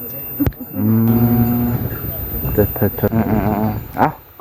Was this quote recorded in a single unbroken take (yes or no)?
no